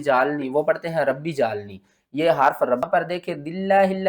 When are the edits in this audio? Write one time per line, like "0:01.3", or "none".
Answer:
0:02.9